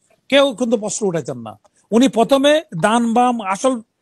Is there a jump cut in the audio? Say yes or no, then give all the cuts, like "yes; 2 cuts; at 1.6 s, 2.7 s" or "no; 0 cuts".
no; 0 cuts